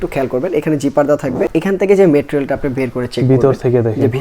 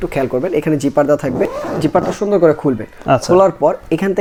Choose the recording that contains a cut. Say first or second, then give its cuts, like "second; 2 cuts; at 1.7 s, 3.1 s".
first; 1 cut; at 1.5 s